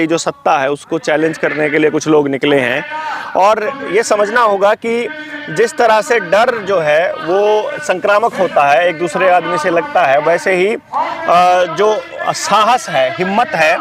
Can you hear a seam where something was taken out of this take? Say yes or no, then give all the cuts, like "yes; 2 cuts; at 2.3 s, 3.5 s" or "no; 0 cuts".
no; 0 cuts